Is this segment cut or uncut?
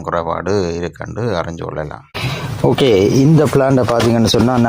cut